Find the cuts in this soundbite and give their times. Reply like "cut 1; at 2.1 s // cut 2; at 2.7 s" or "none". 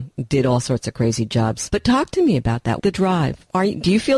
cut 1; at 1.6 s // cut 2; at 2.8 s